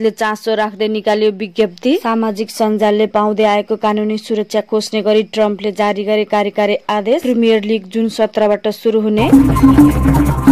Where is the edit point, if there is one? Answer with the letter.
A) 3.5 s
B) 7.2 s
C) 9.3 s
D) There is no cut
C